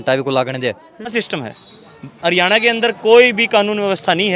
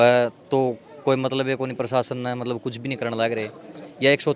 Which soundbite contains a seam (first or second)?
first